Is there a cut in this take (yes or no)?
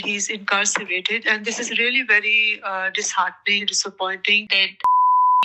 yes